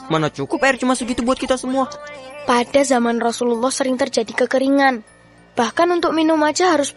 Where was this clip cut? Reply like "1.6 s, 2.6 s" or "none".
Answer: none